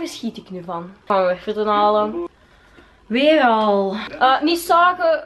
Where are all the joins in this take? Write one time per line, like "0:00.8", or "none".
0:01.1